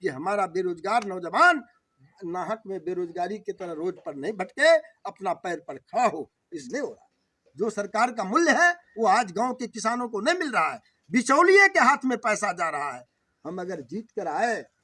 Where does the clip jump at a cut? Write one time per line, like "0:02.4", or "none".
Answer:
0:06.6